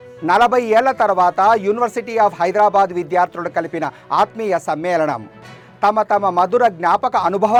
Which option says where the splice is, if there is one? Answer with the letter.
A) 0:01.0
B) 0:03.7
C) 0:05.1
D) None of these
D